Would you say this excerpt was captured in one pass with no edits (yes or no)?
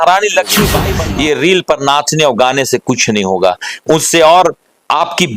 no